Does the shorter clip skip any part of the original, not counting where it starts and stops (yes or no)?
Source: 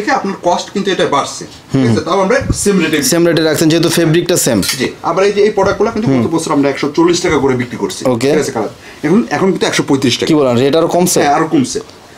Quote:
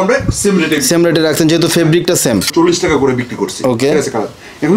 yes